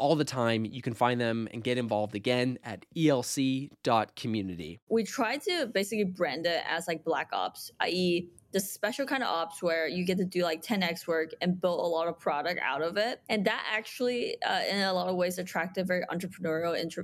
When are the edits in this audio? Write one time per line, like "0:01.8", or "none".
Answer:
0:04.8